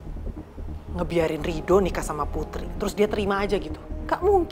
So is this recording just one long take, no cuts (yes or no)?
no